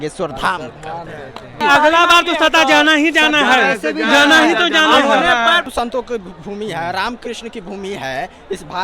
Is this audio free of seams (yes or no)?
no